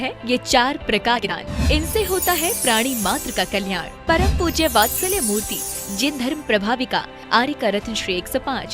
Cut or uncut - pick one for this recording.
cut